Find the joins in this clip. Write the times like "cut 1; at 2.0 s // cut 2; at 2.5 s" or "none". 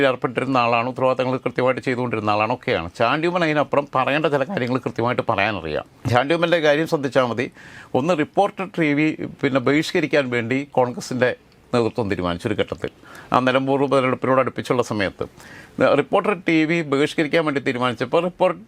none